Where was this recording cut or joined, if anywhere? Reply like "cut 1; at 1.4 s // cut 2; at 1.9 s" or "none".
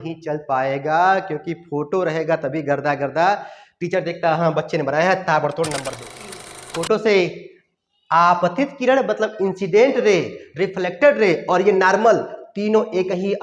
cut 1; at 6.3 s